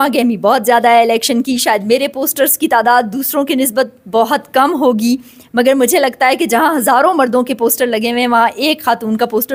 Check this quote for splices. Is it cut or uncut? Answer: uncut